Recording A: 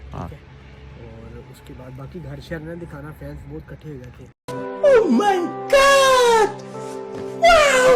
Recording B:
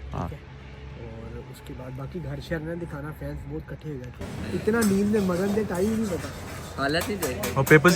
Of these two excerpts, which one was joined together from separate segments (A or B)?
B